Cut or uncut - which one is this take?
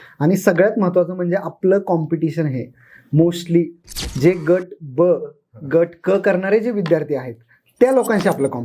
uncut